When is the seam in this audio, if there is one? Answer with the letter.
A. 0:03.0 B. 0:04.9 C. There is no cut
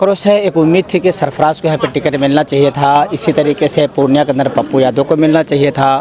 C